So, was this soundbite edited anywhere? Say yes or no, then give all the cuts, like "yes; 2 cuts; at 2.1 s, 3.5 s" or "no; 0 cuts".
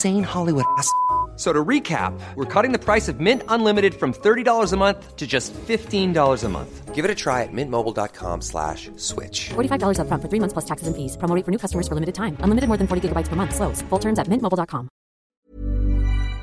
yes; 1 cut; at 15.2 s